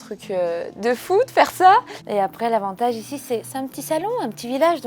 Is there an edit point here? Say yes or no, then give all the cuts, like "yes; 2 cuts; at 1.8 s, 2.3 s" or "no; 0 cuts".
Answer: yes; 1 cut; at 2.0 s